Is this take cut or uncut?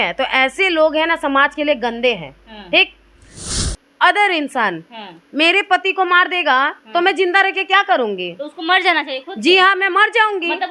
cut